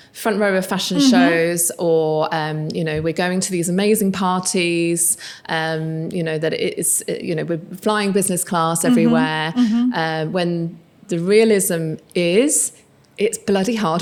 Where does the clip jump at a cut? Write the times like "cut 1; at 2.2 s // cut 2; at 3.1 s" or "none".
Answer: none

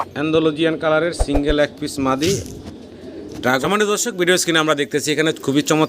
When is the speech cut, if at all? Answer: cut 1; at 3.6 s

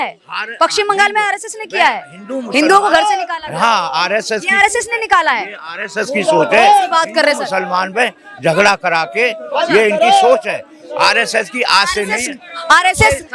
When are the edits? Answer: none

